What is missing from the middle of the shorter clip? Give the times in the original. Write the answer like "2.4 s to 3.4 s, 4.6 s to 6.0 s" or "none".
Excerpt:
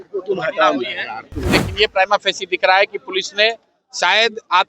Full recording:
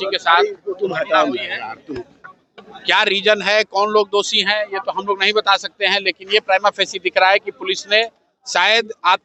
2.2 s to 6.2 s